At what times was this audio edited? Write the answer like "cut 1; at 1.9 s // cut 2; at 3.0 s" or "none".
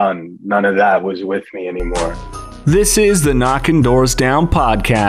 cut 1; at 2.6 s